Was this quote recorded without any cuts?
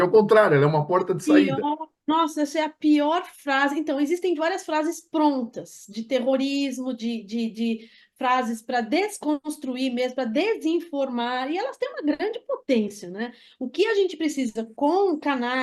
yes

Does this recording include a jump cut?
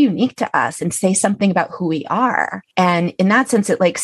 yes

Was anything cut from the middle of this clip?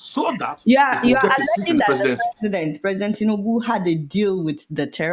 no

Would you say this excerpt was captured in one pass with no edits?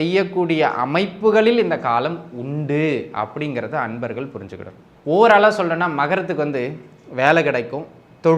no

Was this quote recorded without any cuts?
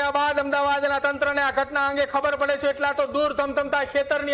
yes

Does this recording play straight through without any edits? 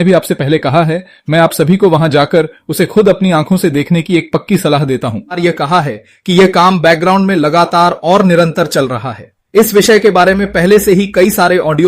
no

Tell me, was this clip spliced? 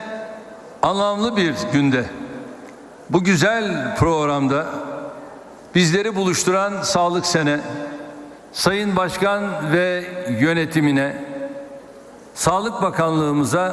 yes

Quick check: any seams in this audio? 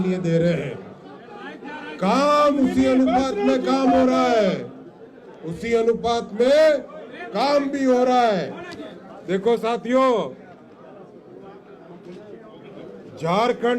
no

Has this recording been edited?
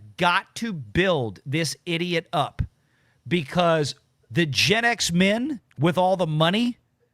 yes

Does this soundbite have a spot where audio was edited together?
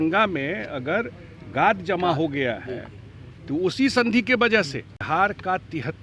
yes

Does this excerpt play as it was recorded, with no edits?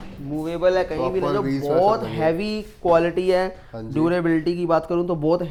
yes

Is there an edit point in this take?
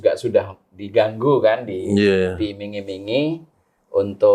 no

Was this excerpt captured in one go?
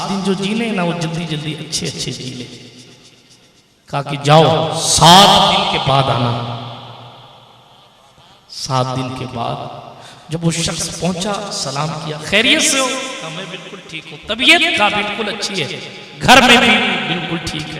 yes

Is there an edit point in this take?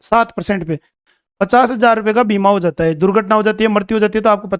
yes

